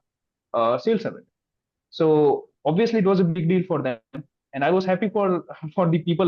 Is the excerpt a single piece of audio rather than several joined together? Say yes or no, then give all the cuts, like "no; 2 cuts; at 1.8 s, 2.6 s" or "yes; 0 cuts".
yes; 0 cuts